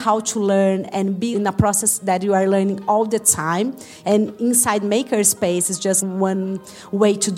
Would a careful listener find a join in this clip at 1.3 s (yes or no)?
yes